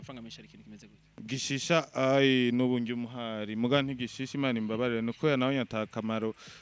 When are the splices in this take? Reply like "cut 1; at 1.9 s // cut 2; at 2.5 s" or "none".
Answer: cut 1; at 1.0 s